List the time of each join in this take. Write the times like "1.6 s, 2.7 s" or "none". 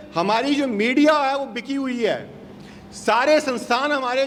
none

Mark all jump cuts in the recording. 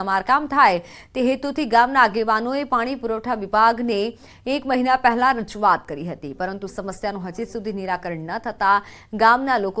3.4 s

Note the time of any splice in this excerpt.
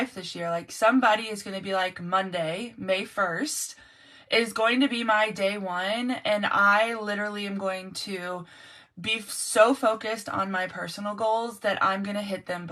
none

